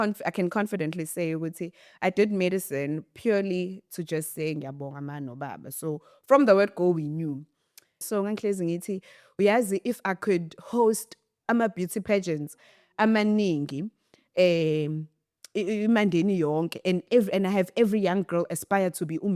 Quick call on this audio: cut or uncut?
cut